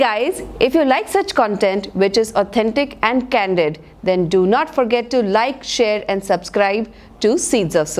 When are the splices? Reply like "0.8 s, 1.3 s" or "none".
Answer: none